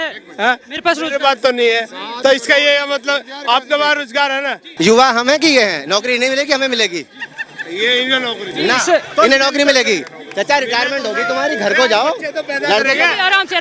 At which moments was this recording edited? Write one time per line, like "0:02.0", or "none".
0:04.6